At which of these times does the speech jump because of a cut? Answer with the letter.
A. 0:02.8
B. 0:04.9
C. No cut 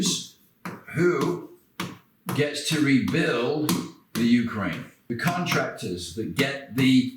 B